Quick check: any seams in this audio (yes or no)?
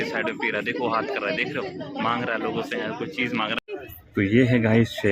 yes